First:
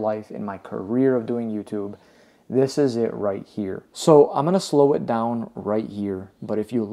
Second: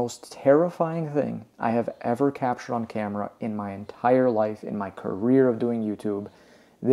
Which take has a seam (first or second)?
first